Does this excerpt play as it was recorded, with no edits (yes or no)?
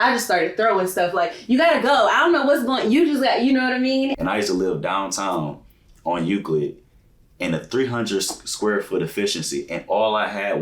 no